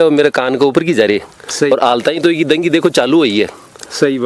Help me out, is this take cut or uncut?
cut